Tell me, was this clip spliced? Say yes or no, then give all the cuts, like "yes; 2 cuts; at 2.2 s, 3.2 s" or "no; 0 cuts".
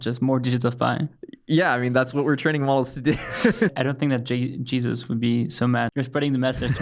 yes; 2 cuts; at 3.7 s, 5.9 s